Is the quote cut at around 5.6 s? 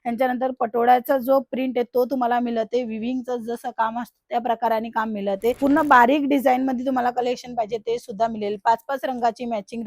yes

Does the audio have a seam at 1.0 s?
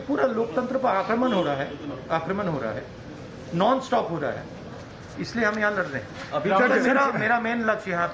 yes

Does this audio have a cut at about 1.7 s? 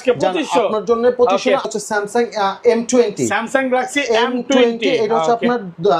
yes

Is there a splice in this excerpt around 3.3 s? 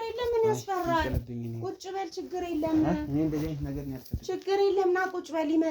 no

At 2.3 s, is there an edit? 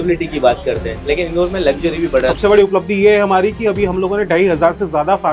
yes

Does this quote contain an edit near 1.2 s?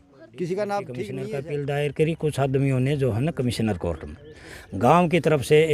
yes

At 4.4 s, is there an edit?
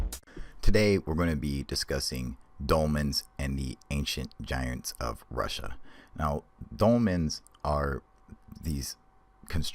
no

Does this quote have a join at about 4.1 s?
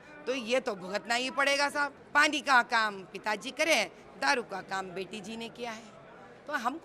no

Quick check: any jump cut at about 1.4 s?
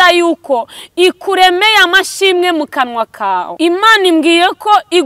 no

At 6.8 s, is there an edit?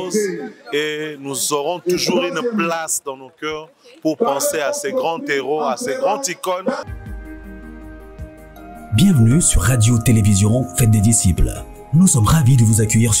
yes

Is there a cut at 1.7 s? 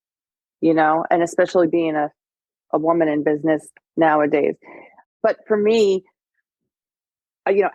yes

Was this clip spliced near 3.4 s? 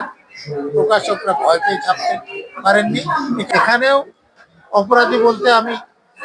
yes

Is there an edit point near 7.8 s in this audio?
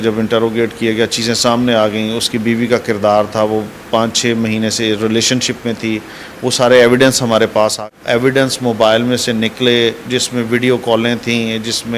yes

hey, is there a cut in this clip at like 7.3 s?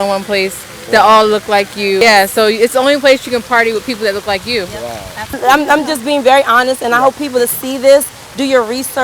no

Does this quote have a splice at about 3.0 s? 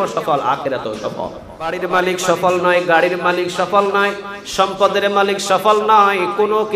no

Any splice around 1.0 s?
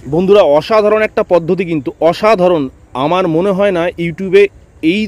no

